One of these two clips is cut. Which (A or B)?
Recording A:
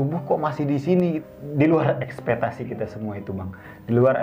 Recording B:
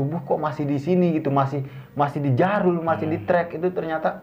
A